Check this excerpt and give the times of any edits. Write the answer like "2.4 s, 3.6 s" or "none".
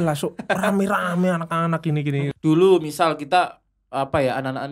2.3 s

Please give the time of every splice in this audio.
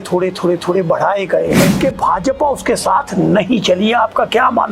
1.7 s

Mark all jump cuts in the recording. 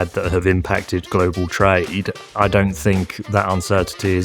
2.3 s

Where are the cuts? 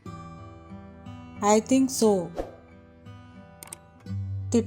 2.3 s, 3.8 s

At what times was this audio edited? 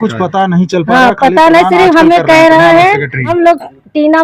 3.3 s

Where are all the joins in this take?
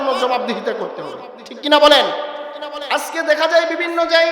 2.7 s

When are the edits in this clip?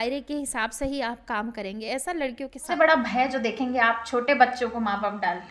2.7 s

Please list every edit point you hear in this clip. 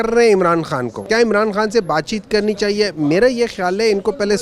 0.9 s

